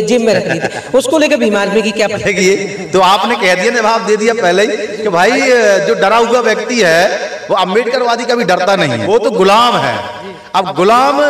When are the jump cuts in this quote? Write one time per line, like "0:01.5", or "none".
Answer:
0:09.0